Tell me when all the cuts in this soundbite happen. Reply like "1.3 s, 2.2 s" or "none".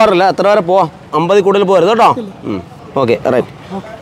1.1 s, 2.7 s